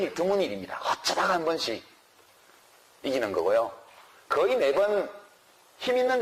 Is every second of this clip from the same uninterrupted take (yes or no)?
yes